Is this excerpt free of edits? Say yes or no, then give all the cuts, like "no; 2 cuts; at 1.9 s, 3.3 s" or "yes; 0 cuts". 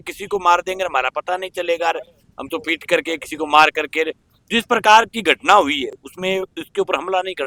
yes; 0 cuts